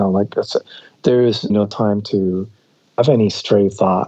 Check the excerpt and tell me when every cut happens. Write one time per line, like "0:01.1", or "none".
0:01.5
0:02.9